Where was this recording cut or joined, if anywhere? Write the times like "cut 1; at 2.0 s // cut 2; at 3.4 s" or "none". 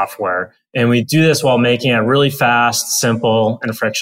cut 1; at 1.0 s